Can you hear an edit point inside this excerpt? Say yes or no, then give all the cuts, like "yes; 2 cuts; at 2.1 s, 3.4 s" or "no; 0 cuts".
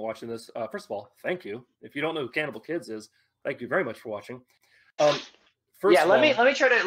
yes; 1 cut; at 5.0 s